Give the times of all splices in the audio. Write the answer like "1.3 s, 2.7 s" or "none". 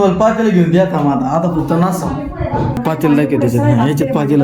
2.8 s